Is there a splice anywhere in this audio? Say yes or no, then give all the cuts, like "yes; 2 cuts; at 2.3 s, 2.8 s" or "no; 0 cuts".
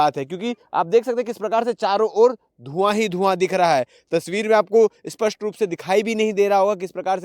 no; 0 cuts